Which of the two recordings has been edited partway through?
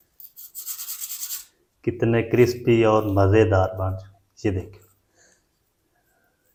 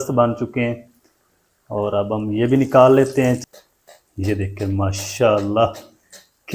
second; 1 cut; at 3.4 s

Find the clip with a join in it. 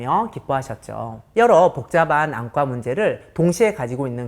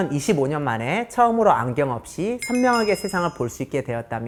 first; 1 cut; at 1.3 s

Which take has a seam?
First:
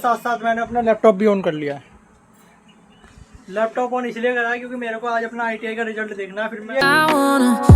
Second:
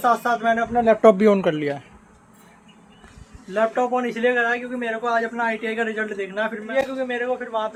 first; 1 cut; at 6.8 s

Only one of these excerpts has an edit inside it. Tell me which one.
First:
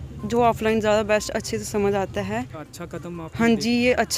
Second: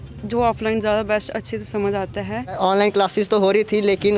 second; 1 cut; at 2.6 s

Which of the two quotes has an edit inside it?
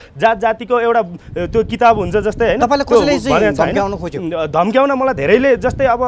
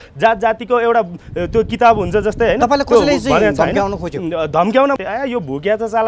second; 1 cut; at 5.0 s

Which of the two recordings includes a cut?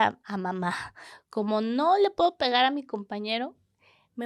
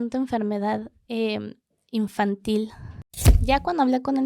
second; 1 cut; at 3.2 s

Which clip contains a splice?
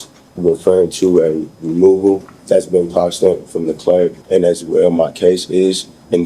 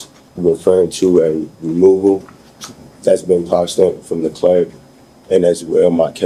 first; 2 cuts; at 2.3 s, 4.2 s

